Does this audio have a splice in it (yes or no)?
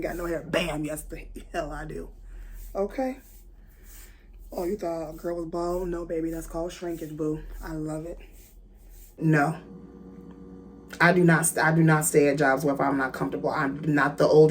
yes